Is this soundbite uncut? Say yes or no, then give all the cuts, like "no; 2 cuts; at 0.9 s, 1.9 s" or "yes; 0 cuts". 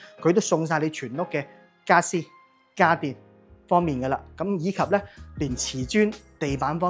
yes; 0 cuts